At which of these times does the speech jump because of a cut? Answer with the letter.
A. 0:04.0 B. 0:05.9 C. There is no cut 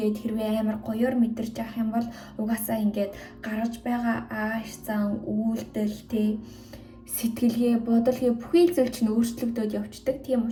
C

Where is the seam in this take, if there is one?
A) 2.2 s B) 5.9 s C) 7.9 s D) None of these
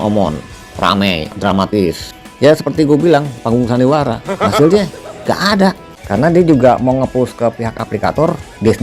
B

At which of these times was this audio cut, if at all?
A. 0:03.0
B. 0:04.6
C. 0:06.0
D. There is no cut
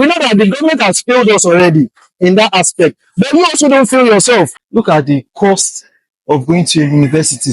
B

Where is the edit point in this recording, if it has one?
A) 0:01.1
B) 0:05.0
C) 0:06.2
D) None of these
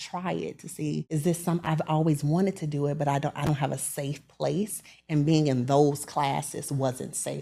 A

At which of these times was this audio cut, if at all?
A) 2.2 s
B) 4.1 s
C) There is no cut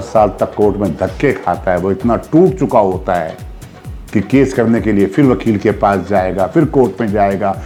C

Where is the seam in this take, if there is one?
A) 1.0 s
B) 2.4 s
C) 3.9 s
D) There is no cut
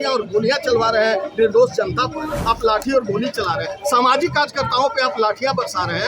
B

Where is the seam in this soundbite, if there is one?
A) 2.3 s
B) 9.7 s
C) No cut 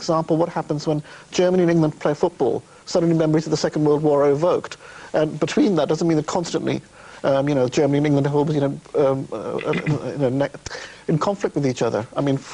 A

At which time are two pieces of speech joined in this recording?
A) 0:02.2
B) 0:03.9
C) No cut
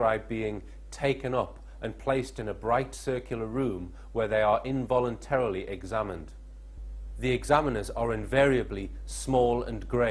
C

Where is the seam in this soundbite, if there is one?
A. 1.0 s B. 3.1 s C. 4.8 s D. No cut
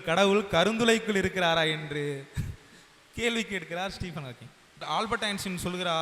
C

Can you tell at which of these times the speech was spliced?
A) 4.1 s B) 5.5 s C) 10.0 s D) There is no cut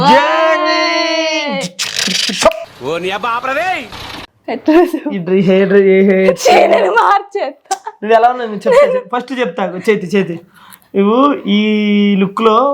A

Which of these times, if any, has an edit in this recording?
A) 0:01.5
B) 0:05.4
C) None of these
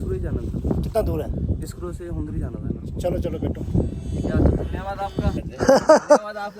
B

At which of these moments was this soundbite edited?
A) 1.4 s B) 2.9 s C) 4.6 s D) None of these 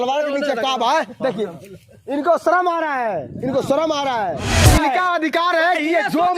C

